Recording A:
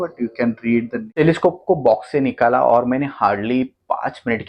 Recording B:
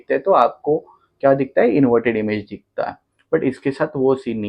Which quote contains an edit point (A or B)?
A